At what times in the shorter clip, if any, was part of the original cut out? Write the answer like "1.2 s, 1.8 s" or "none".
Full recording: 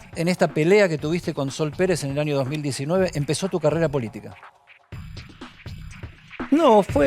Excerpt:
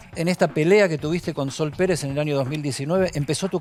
none